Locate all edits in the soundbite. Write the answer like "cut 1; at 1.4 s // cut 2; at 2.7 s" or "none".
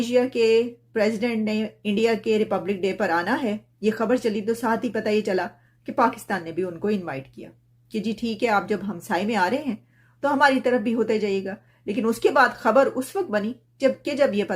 none